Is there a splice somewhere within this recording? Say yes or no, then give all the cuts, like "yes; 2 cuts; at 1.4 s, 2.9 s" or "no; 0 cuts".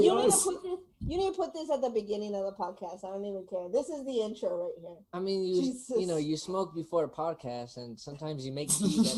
no; 0 cuts